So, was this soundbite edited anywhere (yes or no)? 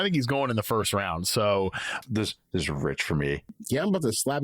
yes